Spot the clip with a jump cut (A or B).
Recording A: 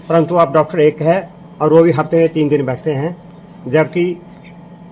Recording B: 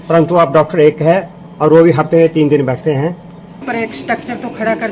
B